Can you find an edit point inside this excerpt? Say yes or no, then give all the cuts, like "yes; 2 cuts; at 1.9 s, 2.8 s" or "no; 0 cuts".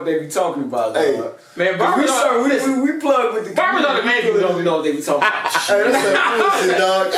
no; 0 cuts